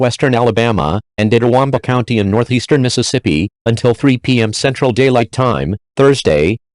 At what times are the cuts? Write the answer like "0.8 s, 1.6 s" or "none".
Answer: 1.0 s